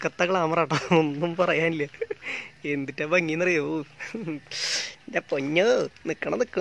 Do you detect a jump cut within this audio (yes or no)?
no